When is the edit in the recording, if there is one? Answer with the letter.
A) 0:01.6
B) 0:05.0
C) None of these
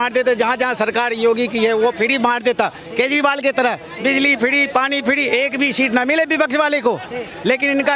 C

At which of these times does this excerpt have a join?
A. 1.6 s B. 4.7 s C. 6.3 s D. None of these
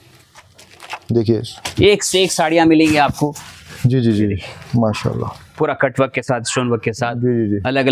A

